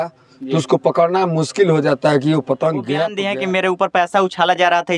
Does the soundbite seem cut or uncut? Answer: cut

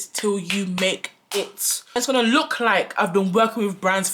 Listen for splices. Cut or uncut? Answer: cut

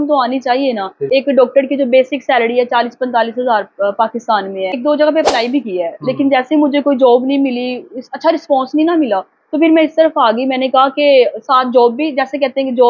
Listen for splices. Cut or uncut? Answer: cut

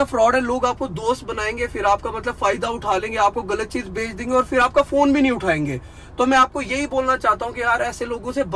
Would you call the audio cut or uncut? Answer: uncut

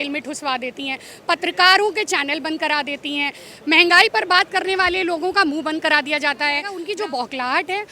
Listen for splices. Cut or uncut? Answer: cut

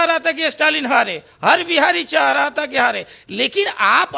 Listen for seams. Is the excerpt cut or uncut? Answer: uncut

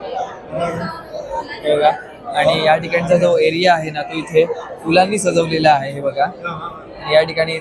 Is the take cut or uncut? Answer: uncut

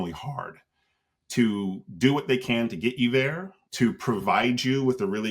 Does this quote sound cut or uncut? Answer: cut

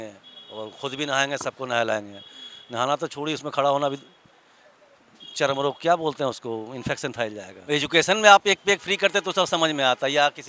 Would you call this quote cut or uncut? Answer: cut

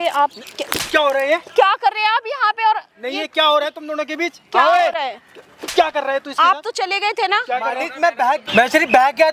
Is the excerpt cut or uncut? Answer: uncut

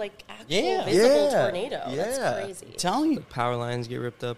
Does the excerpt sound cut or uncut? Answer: cut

